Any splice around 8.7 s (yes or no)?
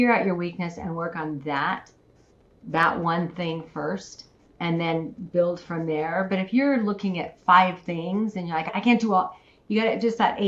yes